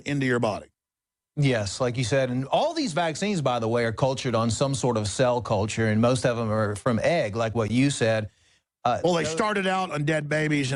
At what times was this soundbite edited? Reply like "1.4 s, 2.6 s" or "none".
none